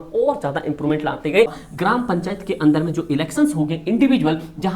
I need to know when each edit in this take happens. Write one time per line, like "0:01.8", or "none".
0:01.6